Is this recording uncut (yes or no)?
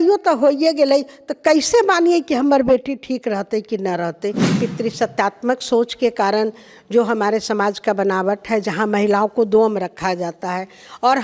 no